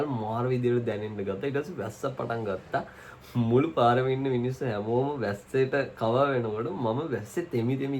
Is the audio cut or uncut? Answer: uncut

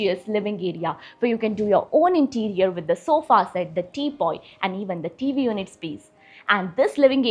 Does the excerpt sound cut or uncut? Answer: uncut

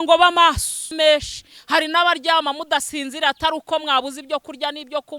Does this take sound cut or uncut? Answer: cut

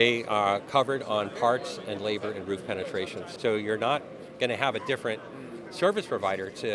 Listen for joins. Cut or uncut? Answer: cut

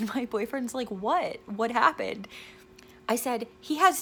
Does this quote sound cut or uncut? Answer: uncut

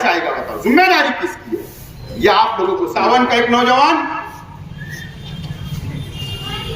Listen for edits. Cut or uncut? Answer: cut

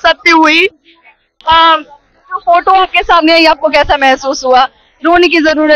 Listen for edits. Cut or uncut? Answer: uncut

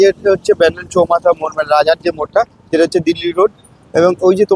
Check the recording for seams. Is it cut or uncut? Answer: uncut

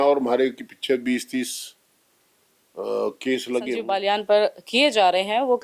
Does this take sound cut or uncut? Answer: cut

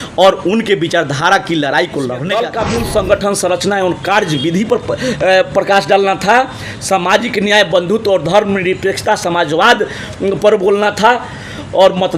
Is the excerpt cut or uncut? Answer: cut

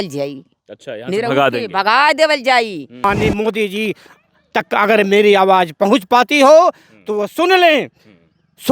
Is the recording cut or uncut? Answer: cut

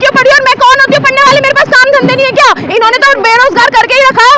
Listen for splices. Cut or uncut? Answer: uncut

